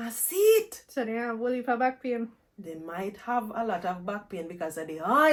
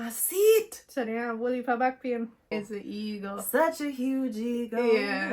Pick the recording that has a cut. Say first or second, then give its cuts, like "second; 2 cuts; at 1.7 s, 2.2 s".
second; 1 cut; at 2.5 s